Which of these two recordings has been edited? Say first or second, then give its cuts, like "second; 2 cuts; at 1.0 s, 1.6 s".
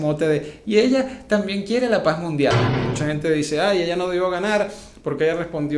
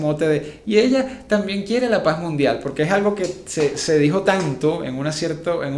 first; 1 cut; at 2.6 s